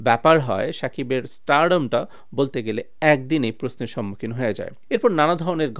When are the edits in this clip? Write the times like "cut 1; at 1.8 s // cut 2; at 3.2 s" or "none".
none